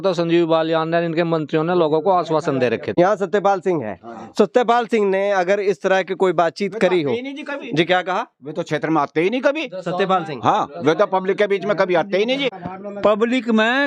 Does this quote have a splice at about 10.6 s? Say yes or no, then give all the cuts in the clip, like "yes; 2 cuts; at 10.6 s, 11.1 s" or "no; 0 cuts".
no; 2 cuts; at 2.9 s, 12.6 s